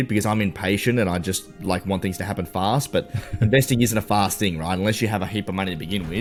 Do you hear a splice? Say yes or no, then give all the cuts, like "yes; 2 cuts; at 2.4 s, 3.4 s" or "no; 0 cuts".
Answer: no; 0 cuts